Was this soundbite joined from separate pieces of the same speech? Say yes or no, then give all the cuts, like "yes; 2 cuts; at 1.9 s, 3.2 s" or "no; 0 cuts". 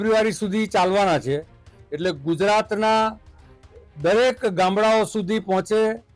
no; 0 cuts